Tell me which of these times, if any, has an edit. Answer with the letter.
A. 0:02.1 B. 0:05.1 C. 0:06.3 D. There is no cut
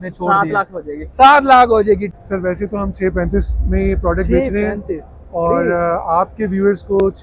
A